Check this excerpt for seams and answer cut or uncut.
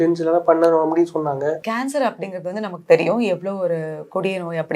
cut